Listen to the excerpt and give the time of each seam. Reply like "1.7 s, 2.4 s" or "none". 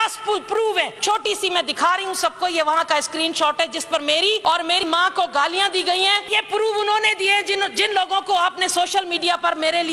1.0 s, 4.4 s, 6.3 s